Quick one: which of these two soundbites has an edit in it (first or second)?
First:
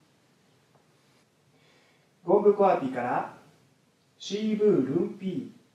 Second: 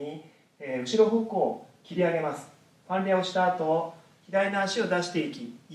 first